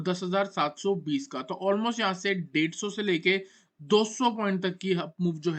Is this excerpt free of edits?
yes; 0 cuts

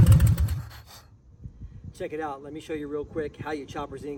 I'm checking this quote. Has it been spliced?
no; 0 cuts

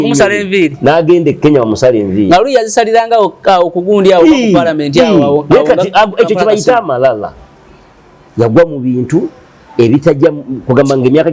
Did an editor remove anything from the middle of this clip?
no; 0 cuts

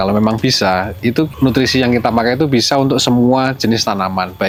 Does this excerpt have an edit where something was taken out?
no; 0 cuts

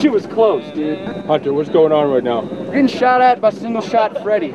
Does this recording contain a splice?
yes; 1 cut; at 1.1 s

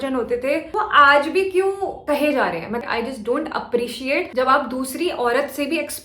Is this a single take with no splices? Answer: no; 1 cut; at 2.8 s

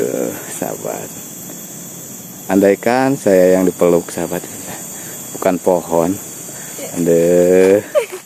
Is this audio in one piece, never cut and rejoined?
yes; 0 cuts

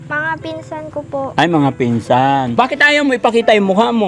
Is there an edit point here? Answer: yes; 1 cut; at 2.5 s

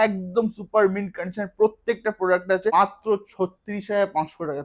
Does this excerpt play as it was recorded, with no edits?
no; 1 cut; at 2.7 s

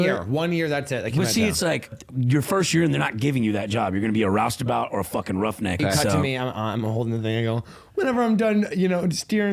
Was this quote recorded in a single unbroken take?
no; 2 cuts; at 2.0 s, 5.8 s

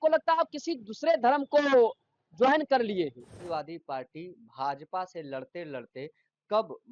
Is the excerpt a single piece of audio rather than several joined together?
no; 1 cut; at 3.4 s

